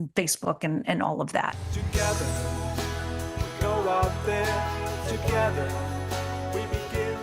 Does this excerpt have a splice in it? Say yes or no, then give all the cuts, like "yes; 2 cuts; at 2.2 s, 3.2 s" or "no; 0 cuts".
yes; 1 cut; at 1.6 s